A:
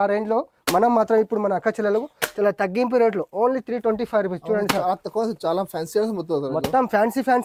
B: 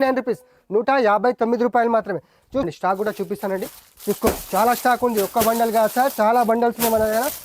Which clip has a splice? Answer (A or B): B